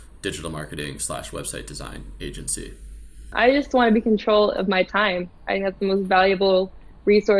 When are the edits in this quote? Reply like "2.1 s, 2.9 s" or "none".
3.3 s